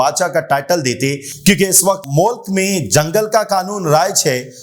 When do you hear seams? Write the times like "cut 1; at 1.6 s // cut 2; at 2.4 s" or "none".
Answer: none